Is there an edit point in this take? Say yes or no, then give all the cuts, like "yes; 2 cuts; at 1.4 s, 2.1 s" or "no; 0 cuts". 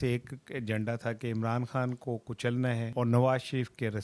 yes; 1 cut; at 2.9 s